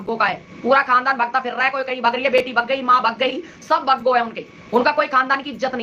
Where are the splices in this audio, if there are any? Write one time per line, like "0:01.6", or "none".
none

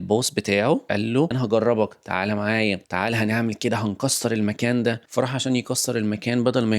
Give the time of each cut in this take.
0:01.2
0:02.8

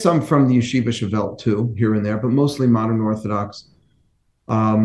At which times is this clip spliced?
none

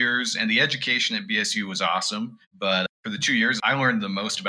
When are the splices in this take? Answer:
0:02.8

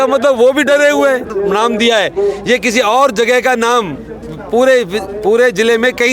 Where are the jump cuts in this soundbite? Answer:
0:01.3

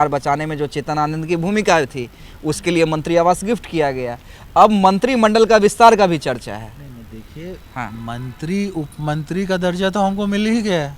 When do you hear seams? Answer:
none

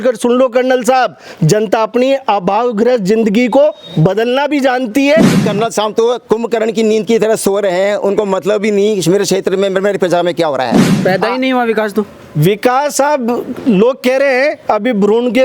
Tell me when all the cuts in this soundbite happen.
0:05.4
0:10.9

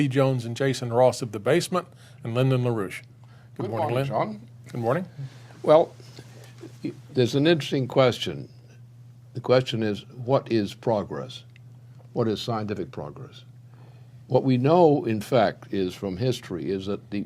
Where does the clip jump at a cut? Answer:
0:14.0

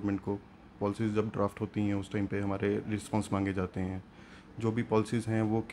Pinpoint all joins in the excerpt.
none

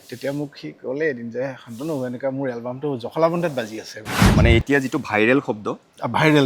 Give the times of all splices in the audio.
0:04.2

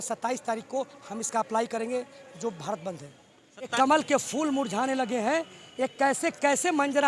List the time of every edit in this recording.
0:03.7

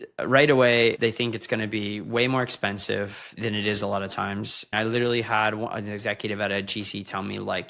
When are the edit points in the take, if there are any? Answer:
0:01.0
0:03.3
0:04.7

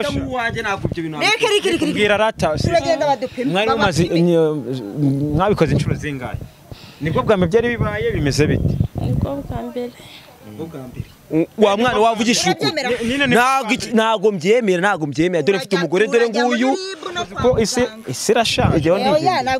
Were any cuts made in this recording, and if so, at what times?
none

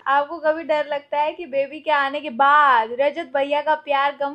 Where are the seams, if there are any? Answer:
none

